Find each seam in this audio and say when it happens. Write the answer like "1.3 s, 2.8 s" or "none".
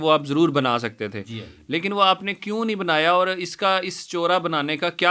none